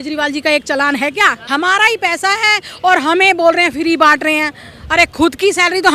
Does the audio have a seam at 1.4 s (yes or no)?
yes